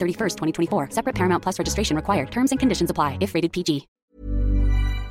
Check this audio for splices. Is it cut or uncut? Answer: cut